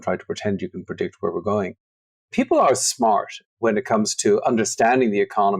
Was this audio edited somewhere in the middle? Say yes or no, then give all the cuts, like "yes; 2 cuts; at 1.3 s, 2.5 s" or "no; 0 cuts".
yes; 1 cut; at 2.0 s